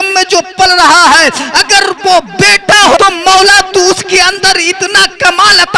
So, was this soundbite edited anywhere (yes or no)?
no